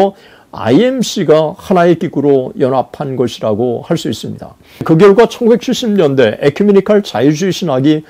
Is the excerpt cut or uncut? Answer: cut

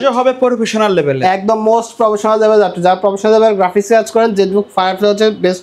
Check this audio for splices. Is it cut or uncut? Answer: uncut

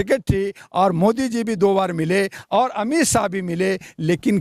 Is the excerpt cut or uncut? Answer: uncut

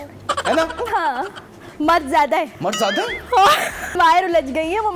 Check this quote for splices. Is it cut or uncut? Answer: cut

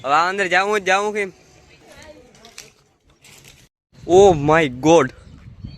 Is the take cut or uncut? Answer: cut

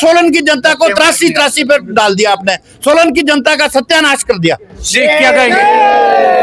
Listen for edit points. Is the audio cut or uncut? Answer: uncut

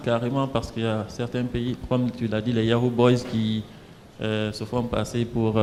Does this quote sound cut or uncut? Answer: uncut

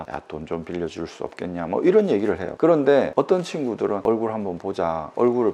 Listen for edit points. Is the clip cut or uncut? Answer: cut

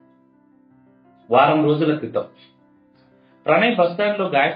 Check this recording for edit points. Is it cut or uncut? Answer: cut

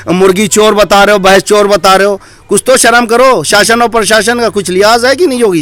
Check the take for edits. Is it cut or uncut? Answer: uncut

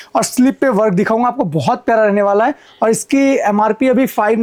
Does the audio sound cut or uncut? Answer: uncut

